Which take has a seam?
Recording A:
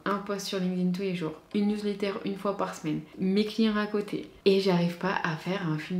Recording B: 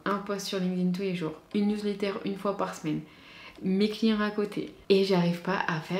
A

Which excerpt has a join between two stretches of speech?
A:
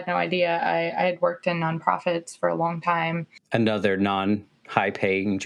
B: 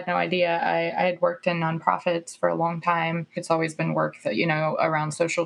B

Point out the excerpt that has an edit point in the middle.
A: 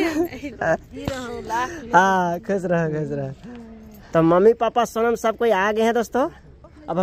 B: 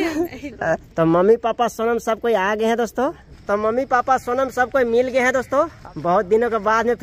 B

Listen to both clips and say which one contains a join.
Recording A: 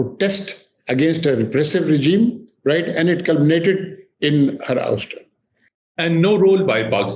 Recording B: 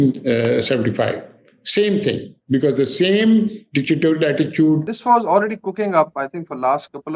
B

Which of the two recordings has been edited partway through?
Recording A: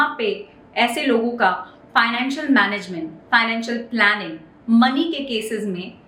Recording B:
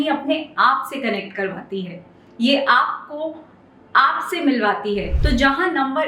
B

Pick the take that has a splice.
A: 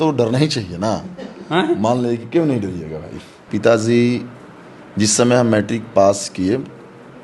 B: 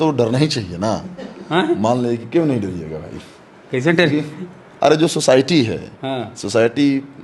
A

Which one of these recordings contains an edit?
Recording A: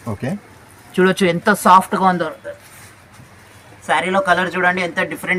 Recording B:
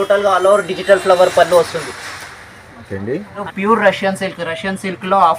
B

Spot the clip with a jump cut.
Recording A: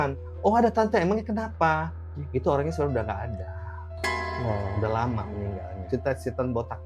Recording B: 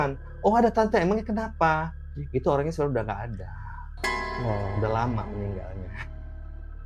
A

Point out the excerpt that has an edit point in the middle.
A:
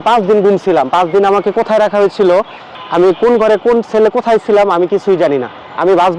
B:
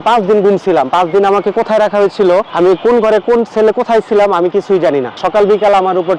B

